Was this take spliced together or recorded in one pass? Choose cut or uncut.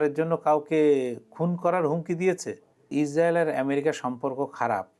cut